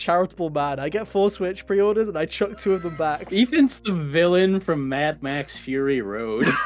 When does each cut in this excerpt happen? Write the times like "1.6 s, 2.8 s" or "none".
3.3 s